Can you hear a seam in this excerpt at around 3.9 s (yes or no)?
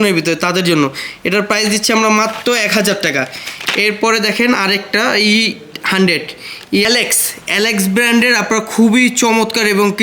no